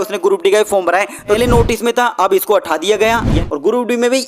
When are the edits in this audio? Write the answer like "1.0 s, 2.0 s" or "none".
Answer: 1.4 s, 3.4 s

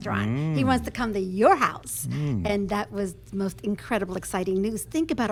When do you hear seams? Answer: none

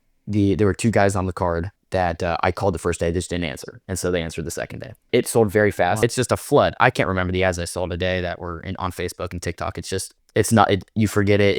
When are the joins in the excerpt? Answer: 1.8 s, 4.9 s, 6.0 s

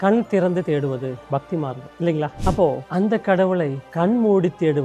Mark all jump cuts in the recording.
none

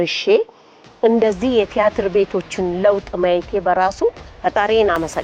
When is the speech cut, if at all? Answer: 4.3 s

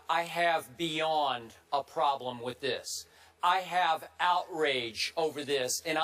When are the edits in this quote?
4.1 s

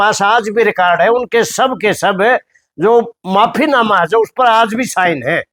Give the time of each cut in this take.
none

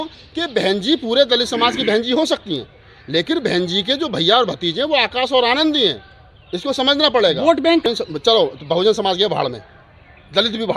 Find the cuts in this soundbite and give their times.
7.8 s

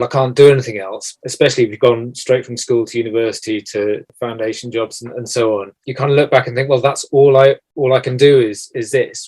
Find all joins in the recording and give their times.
1.1 s, 4.1 s, 5.8 s, 7.7 s

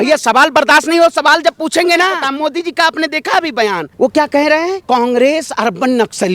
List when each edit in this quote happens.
2.2 s, 3.9 s, 4.8 s

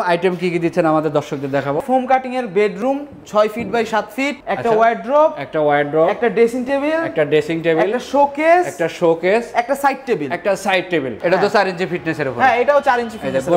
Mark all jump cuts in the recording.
1.8 s, 4.4 s, 11.2 s

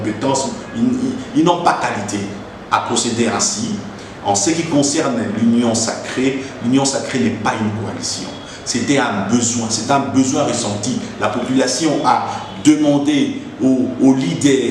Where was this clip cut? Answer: none

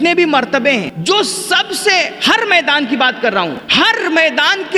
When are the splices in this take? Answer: 0.9 s, 3.6 s

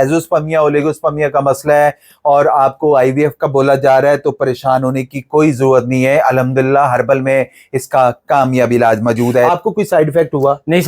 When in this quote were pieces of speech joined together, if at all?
9.4 s

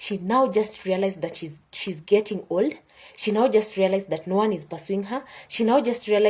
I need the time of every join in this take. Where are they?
none

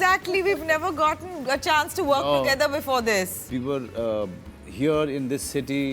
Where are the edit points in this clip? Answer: 3.4 s

